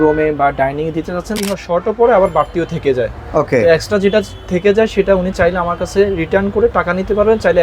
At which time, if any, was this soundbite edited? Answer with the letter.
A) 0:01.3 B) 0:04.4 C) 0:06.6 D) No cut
A